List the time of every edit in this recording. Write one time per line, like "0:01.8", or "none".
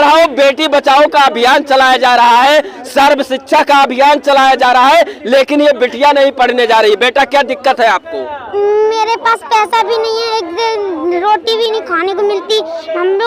none